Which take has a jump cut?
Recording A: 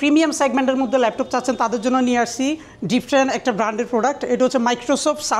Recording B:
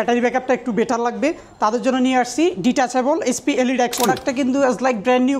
B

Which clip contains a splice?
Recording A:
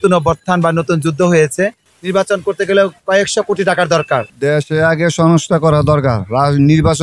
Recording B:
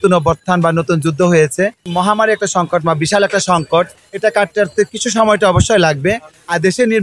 A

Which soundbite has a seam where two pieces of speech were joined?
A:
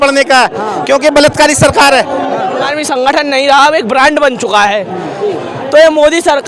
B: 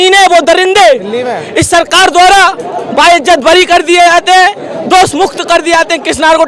A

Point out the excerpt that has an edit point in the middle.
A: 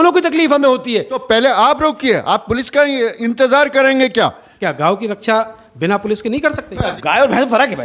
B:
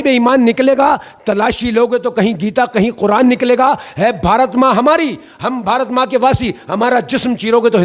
A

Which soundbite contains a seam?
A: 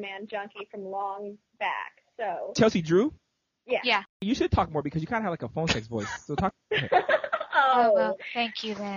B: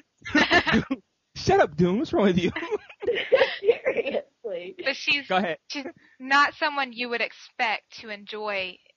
A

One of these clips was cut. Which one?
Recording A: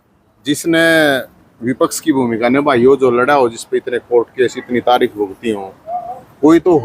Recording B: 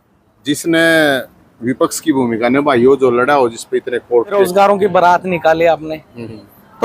B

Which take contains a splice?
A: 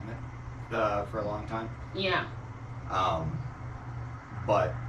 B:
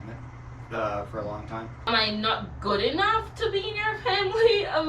B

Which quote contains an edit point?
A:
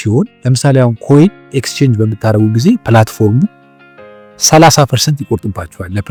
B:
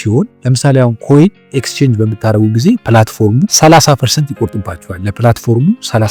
B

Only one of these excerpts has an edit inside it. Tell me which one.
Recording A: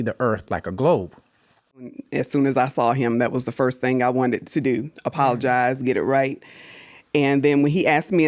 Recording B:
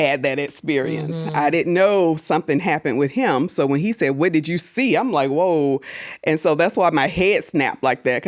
A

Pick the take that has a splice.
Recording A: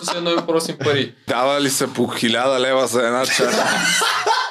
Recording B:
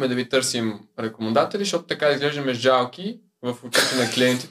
A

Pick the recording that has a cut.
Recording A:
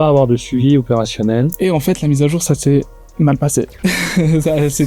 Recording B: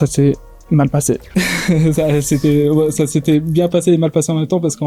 A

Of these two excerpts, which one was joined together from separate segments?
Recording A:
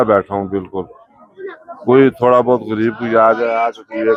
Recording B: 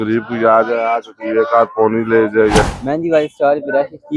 B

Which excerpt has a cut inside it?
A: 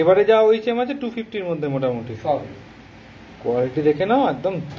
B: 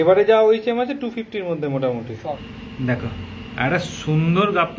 B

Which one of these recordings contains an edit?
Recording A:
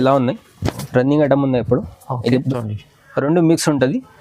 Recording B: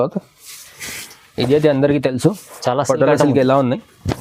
A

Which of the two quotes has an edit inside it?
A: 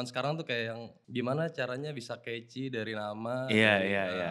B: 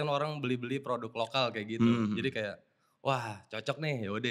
A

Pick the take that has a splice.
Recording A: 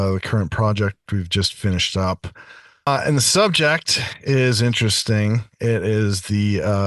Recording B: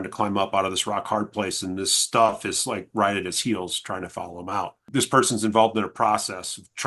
B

